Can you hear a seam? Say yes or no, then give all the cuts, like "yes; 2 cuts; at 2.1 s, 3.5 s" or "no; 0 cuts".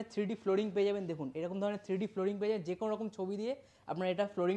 no; 0 cuts